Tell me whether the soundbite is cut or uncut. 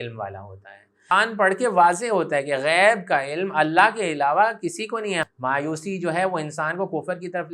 cut